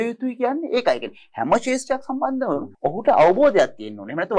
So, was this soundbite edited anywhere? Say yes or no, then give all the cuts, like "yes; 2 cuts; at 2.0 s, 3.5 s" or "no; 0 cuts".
yes; 1 cut; at 2.7 s